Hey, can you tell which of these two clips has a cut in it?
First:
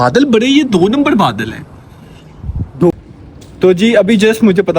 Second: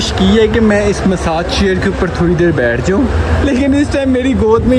first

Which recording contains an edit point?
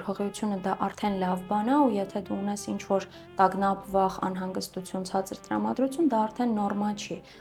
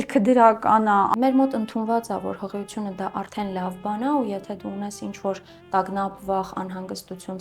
second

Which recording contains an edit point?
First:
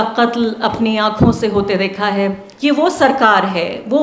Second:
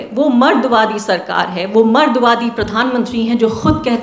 first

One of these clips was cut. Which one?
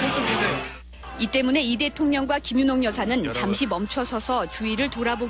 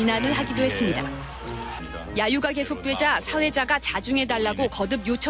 first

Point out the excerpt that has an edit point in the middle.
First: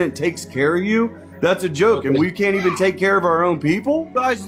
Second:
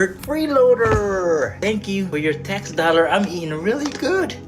second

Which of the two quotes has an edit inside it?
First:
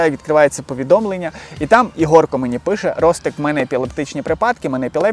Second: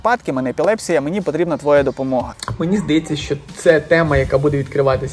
second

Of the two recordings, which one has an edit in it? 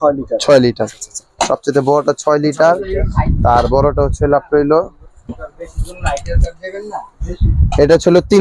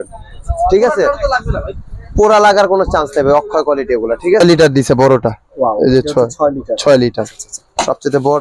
second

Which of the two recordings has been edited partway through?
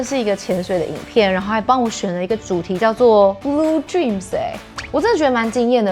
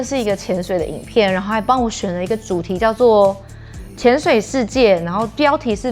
first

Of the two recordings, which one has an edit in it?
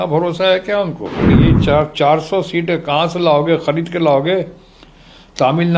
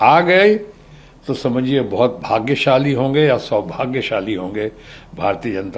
first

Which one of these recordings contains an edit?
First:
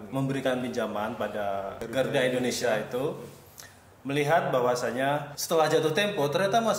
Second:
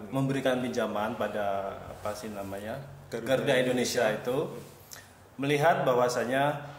first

